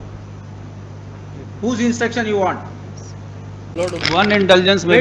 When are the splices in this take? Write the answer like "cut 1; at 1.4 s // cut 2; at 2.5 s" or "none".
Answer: cut 1; at 3.7 s